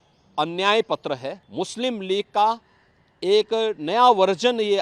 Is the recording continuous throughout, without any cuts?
no; 1 cut; at 1.4 s

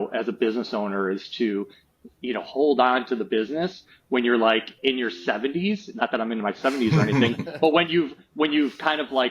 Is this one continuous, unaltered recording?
no; 1 cut; at 2.4 s

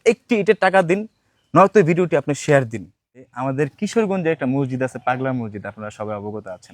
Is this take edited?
yes; 1 cut; at 3.3 s

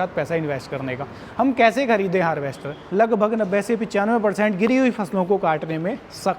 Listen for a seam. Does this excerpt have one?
yes; 1 cut; at 2.8 s

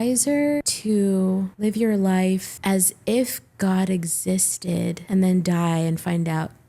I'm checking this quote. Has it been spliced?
no; 0 cuts

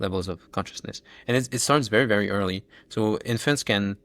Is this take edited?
no; 0 cuts

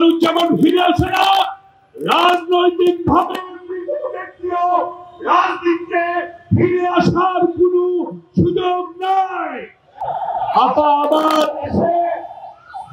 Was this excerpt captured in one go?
no; 1 cut; at 10.1 s

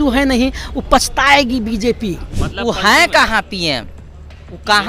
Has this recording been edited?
yes; 1 cut; at 2.4 s

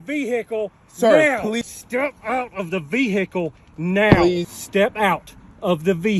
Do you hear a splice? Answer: yes; 2 cuts; at 1.6 s, 4.4 s

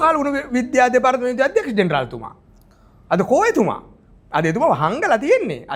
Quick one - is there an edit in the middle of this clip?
no; 0 cuts

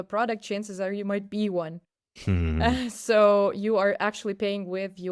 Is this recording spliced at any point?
no; 0 cuts

